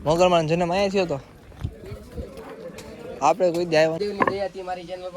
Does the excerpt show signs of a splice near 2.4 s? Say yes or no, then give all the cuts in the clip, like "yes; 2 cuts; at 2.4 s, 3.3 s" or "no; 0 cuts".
no; 1 cut; at 4.0 s